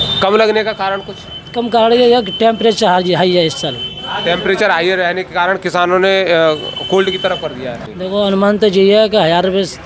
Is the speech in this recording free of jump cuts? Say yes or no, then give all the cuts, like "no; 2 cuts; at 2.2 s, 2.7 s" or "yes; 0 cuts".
no; 1 cut; at 7.7 s